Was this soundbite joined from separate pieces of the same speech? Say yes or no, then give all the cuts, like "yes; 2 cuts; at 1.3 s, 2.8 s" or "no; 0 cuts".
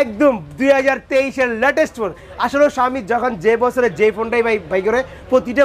no; 0 cuts